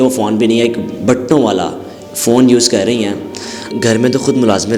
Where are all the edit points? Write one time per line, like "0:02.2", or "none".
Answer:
0:03.7